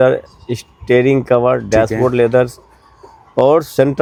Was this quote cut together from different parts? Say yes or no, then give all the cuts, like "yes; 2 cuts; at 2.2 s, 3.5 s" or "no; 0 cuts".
no; 0 cuts